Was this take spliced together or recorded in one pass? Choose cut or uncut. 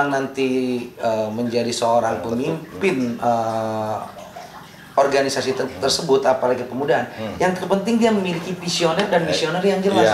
uncut